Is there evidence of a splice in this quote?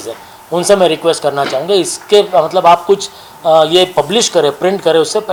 no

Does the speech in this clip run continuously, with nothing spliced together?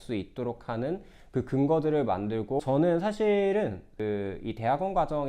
no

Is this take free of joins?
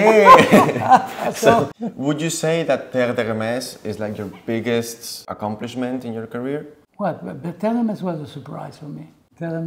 no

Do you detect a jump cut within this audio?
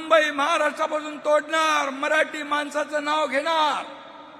no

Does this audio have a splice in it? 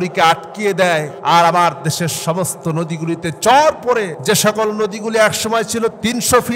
yes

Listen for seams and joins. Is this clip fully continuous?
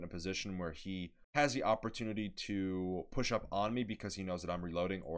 no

